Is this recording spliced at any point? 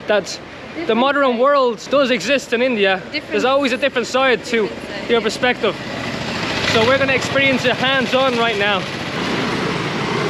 yes; 2 cuts; at 1.8 s, 9.2 s

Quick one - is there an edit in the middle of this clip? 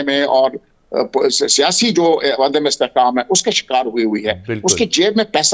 no; 0 cuts

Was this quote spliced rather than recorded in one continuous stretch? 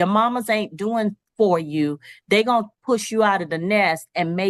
no; 0 cuts

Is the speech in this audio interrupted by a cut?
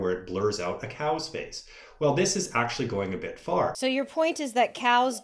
yes; 1 cut; at 3.8 s

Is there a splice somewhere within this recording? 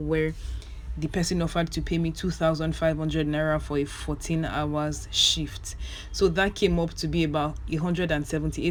no; 0 cuts

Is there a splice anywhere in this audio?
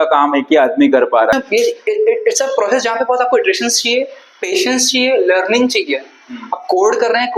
yes; 1 cut; at 1.3 s

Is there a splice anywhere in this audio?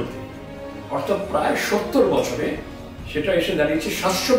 no; 0 cuts

